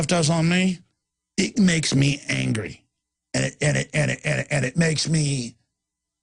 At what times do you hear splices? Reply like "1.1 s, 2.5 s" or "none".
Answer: none